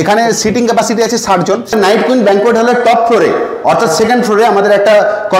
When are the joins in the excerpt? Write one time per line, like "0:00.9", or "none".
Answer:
0:01.7